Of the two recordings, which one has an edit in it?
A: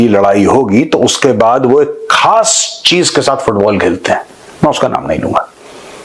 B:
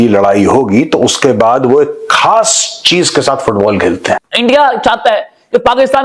B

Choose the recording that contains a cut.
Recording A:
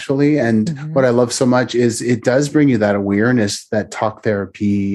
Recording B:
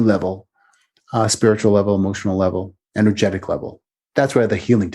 B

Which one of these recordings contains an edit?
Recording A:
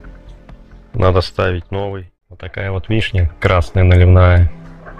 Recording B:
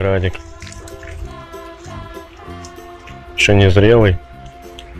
A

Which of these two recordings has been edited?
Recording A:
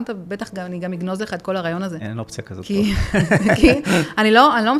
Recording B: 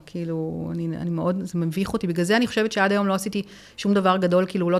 A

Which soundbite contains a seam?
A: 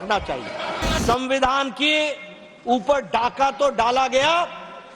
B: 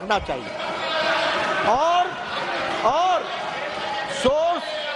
A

